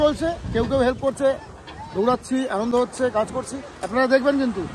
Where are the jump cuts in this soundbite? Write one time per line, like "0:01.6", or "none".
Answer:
none